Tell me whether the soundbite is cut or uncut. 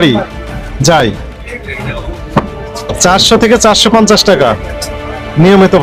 uncut